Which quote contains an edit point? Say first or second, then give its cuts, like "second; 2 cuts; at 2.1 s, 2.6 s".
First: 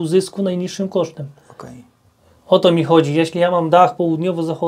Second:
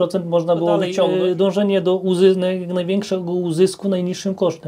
second; 1 cut; at 0.9 s